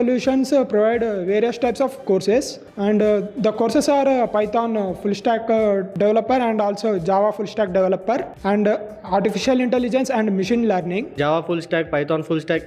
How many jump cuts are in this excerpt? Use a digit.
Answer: 4